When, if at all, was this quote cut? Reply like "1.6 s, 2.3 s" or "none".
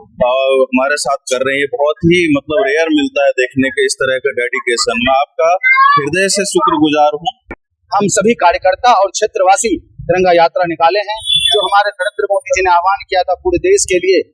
7.6 s